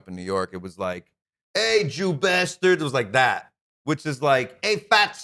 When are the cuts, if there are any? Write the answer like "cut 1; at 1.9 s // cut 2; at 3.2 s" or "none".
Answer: none